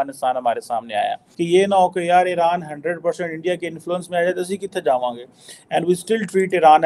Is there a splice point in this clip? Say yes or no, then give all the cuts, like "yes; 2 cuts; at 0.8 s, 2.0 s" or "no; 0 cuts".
yes; 1 cut; at 1.3 s